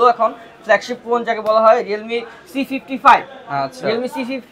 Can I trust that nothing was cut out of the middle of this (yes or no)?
yes